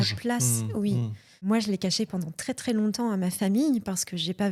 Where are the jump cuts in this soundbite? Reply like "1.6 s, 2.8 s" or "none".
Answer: none